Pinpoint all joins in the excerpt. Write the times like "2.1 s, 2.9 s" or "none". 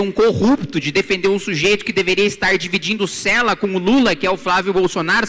none